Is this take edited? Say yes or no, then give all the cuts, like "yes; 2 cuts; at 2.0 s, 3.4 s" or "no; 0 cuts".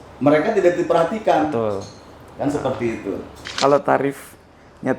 yes; 1 cut; at 3.5 s